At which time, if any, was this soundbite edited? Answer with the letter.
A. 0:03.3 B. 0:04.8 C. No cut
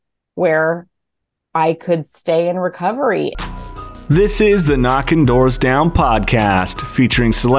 A